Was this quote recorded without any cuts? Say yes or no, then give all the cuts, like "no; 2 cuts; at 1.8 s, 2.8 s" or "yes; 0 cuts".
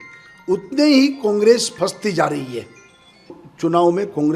no; 1 cut; at 3.4 s